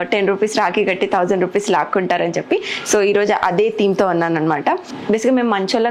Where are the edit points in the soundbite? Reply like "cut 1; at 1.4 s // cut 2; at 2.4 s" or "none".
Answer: cut 1; at 4.9 s